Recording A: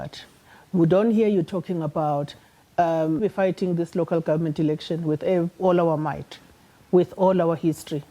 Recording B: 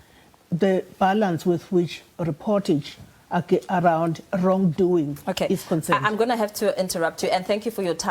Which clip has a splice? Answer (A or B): A